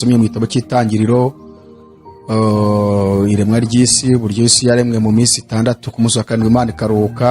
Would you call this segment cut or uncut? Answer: uncut